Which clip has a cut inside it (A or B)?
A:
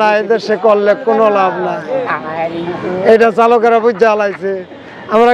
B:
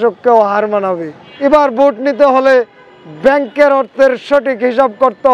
B